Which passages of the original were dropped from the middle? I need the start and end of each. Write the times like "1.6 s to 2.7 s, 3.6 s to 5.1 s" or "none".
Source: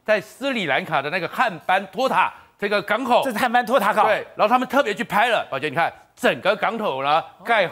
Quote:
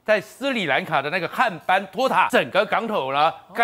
2.3 s to 6.2 s

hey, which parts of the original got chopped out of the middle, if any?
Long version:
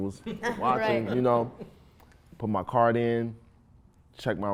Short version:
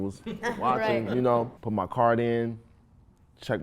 1.6 s to 2.3 s

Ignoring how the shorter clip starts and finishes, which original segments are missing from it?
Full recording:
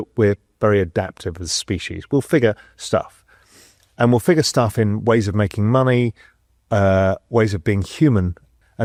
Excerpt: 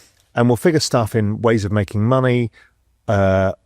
none

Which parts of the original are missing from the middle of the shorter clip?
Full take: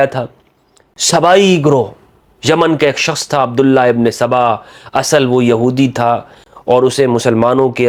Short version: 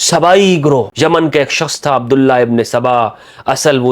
1.9 s to 2.4 s

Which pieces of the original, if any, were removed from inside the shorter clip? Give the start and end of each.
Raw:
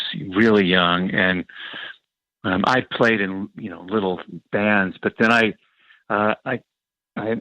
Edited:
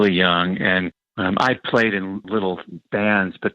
1.5 s to 2.3 s, 3.5 s to 3.8 s

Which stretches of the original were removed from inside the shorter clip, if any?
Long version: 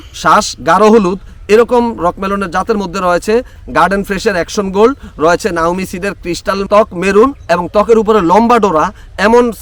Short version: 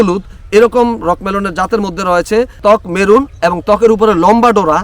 3.5 s to 6.6 s

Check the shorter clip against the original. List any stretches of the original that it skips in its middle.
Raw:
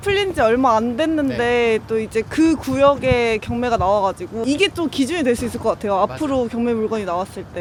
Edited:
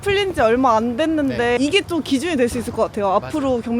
1.6 s to 4.4 s

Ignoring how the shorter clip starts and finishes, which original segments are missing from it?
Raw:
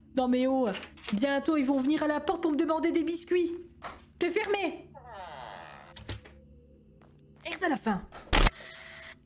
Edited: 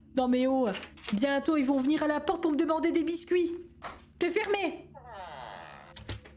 none

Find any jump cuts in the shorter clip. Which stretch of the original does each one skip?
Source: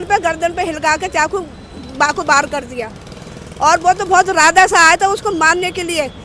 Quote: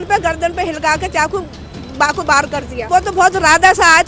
2.9 s to 3.8 s

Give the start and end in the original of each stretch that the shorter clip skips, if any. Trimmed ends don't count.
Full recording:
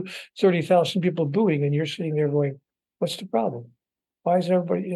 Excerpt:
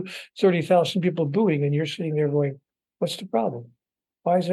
none

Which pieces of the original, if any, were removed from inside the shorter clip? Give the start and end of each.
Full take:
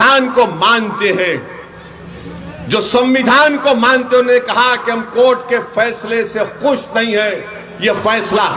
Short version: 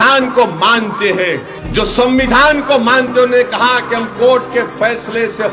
1.5 s to 2.5 s

